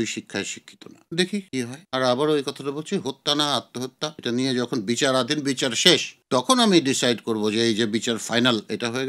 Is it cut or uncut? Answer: cut